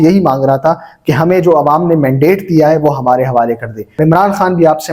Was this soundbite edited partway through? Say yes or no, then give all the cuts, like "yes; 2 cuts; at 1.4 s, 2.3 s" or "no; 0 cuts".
yes; 1 cut; at 3.8 s